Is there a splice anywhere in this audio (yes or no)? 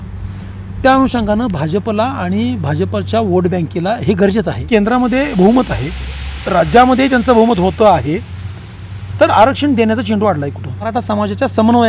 yes